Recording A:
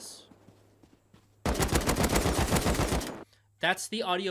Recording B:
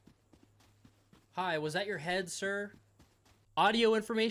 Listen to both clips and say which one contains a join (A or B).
B